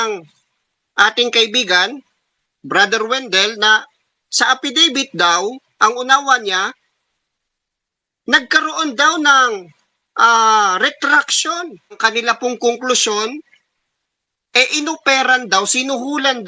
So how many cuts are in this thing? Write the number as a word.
one